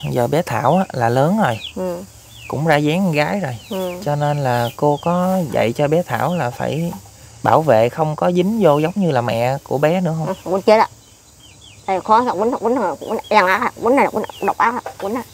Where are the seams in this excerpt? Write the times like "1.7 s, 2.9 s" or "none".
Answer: none